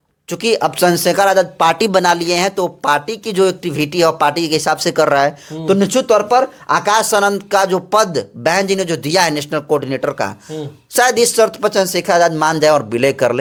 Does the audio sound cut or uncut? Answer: uncut